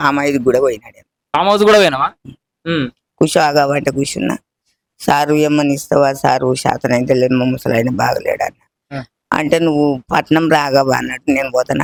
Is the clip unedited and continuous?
yes; 0 cuts

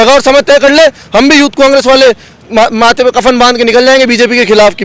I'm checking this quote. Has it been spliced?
no; 0 cuts

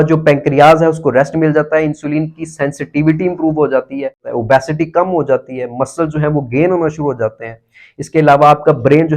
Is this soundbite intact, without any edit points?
no; 1 cut; at 4.3 s

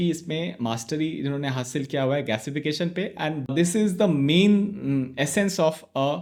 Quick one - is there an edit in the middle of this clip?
no; 0 cuts

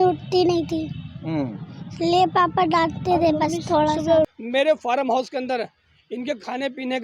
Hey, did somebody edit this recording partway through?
yes; 1 cut; at 4.3 s

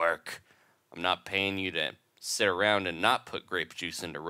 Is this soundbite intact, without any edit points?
yes; 0 cuts

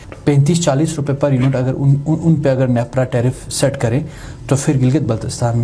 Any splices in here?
no; 0 cuts

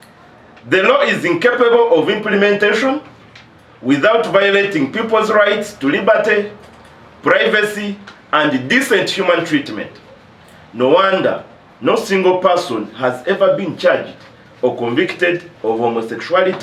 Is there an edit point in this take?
no; 0 cuts

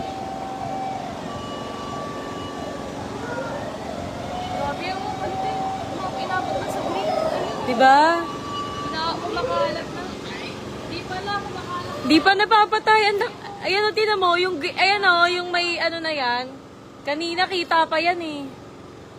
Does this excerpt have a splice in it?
no; 0 cuts

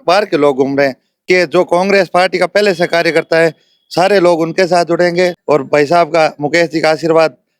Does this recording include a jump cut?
yes; 2 cuts; at 1.2 s, 5.4 s

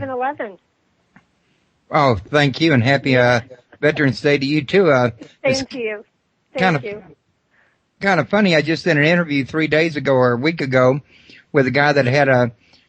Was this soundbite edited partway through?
yes; 1 cut; at 9.2 s

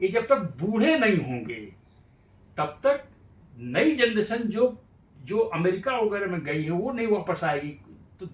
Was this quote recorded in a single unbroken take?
yes; 0 cuts

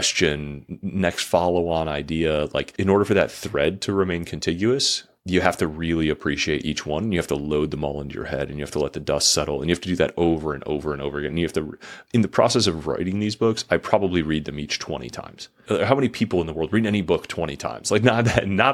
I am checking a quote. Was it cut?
yes; 2 cuts; at 2.7 s, 15.5 s

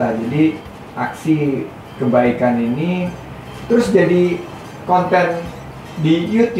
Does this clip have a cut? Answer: no; 0 cuts

